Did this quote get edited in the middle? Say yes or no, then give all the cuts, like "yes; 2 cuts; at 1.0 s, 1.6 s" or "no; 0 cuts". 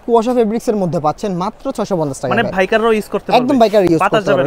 no; 0 cuts